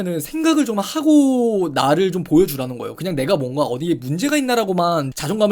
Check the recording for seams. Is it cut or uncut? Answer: uncut